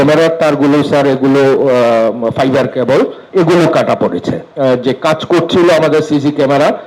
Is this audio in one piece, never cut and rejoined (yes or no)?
no